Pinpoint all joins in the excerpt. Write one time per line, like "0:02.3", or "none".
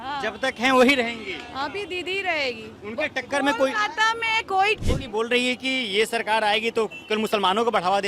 0:04.8